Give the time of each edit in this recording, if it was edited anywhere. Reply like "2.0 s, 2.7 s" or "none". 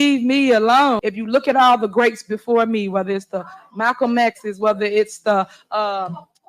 1.0 s